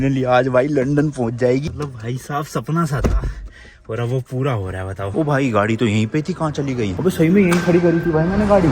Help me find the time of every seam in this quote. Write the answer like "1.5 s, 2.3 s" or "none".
1.7 s, 5.1 s